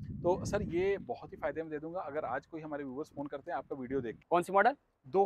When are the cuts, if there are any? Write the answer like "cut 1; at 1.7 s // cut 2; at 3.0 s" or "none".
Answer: cut 1; at 4.2 s